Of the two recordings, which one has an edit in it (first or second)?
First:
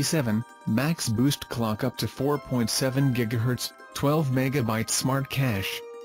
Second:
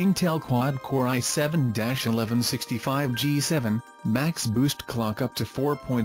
first